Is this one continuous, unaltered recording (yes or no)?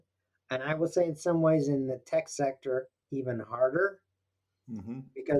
yes